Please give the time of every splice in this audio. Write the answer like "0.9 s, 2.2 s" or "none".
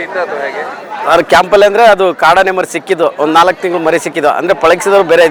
none